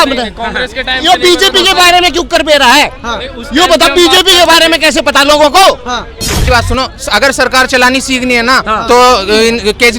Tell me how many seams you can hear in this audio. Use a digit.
1